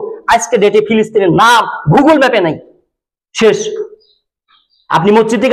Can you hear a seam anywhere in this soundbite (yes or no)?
no